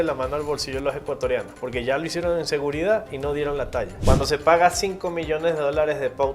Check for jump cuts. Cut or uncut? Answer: cut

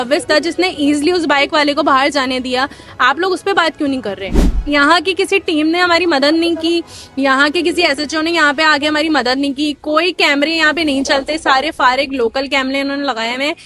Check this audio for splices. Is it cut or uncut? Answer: cut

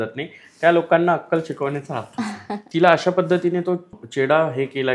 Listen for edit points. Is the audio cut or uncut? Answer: cut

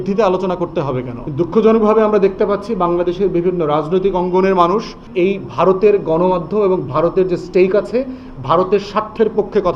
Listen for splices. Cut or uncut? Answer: cut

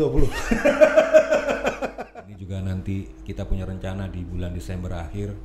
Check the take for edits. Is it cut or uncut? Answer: cut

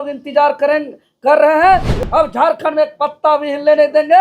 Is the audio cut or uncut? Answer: cut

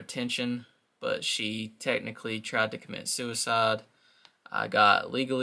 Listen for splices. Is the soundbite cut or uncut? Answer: uncut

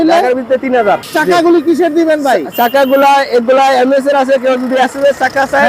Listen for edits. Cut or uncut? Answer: cut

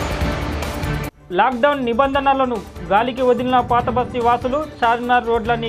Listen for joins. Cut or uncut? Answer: cut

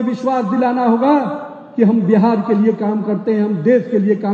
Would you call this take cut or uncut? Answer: uncut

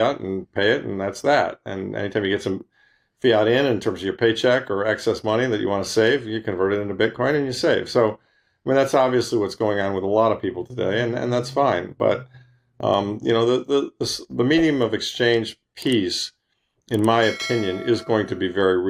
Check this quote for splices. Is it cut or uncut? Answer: uncut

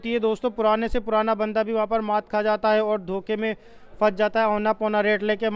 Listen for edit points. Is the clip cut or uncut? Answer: uncut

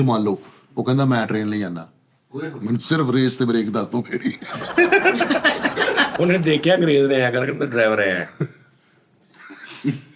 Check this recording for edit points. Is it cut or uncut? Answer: cut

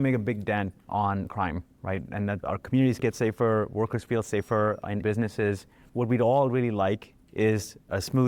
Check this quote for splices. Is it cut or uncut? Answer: uncut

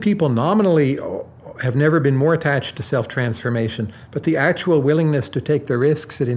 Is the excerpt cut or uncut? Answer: uncut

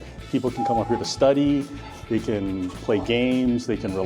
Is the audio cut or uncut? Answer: uncut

